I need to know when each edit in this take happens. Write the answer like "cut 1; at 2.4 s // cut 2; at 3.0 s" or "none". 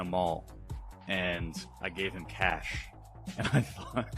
none